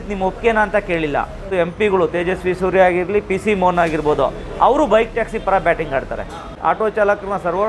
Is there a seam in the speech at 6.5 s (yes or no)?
yes